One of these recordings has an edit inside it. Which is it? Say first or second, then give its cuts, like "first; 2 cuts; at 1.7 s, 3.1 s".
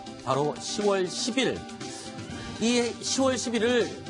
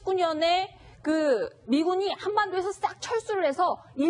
second; 1 cut; at 3.1 s